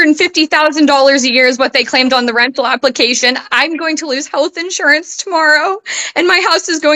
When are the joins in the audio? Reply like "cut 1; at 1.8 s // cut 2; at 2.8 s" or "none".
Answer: none

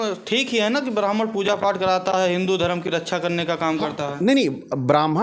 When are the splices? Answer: none

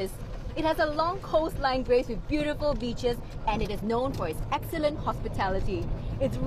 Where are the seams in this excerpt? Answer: none

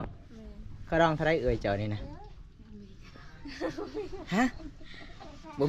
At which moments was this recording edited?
none

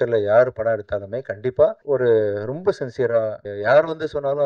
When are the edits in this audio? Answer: cut 1; at 1.8 s // cut 2; at 3.5 s

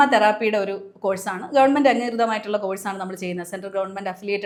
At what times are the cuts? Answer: none

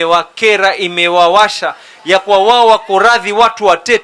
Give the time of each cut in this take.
none

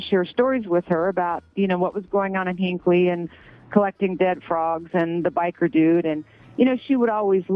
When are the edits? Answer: none

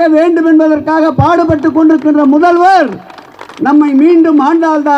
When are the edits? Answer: none

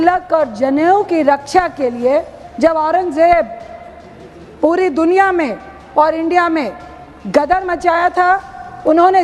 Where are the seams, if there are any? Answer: cut 1; at 2.4 s

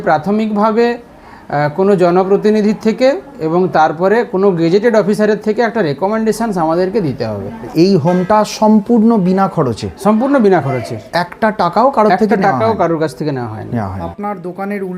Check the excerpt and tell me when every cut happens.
cut 1; at 7.7 s // cut 2; at 14.0 s

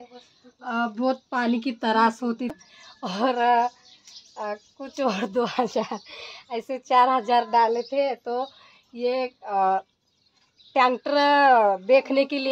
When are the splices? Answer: cut 1; at 2.5 s

